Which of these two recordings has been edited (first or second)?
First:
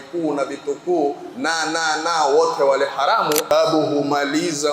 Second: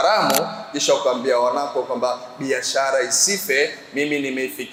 first